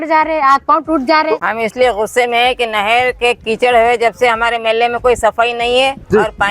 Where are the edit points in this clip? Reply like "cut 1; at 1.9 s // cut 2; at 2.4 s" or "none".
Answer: cut 1; at 1.4 s